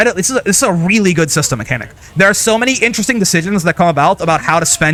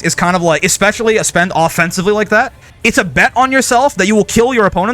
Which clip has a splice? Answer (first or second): second